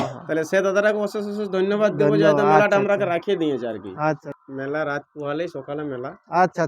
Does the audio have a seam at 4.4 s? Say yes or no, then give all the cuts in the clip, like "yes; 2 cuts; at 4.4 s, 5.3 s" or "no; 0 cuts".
yes; 1 cut; at 4.4 s